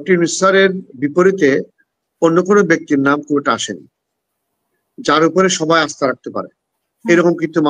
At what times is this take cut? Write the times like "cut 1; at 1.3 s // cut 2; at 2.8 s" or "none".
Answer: none